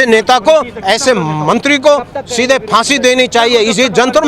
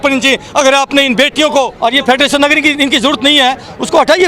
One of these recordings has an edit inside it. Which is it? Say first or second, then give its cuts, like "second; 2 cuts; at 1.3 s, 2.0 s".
second; 1 cut; at 1.7 s